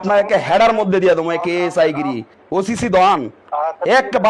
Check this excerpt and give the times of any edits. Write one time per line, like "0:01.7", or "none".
0:02.3